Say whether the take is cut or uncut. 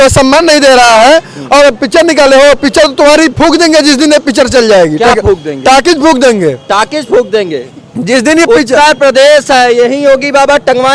uncut